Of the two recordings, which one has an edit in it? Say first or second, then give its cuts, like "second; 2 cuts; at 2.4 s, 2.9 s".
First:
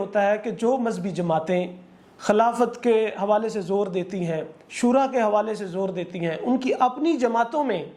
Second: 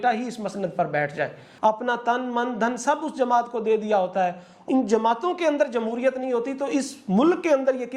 second; 2 cuts; at 1.4 s, 4.5 s